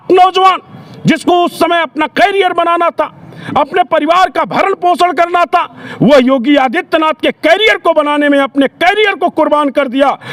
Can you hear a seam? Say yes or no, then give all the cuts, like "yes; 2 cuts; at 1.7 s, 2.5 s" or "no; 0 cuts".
no; 0 cuts